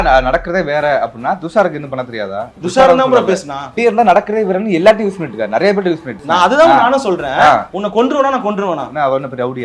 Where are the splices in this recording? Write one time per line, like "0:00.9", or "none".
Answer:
0:02.4
0:03.8
0:06.1
0:08.9